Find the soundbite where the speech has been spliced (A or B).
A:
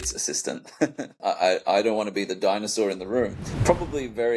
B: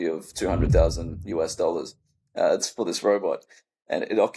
A